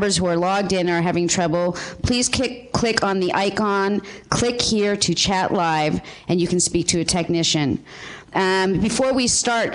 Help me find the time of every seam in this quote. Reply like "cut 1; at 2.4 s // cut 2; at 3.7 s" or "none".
cut 1; at 8.7 s